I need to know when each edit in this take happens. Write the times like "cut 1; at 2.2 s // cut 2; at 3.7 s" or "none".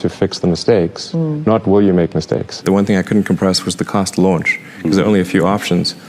cut 1; at 2.6 s